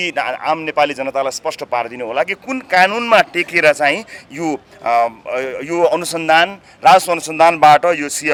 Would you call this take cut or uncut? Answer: uncut